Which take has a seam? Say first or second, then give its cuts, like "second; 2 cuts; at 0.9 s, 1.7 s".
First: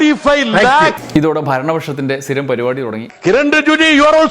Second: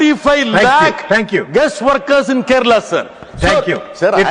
first; 2 cuts; at 1.0 s, 3.1 s